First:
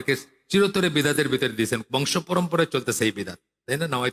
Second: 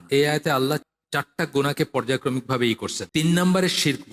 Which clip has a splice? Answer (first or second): second